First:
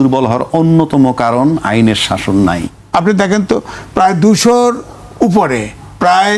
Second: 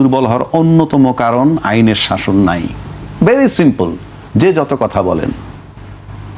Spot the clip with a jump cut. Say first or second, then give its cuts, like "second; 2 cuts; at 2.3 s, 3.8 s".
first; 1 cut; at 2.7 s